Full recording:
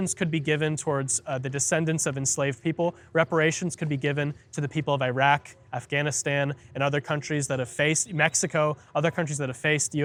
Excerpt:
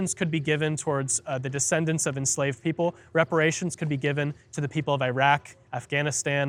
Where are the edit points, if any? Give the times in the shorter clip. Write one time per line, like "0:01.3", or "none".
none